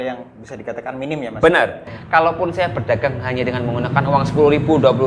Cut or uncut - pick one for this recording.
cut